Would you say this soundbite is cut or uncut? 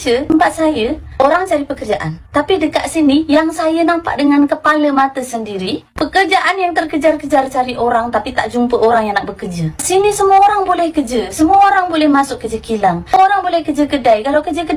uncut